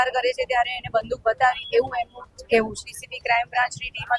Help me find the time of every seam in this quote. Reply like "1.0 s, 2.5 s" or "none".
2.9 s